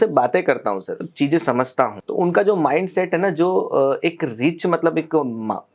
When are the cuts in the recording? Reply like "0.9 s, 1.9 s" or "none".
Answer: 1.0 s, 2.0 s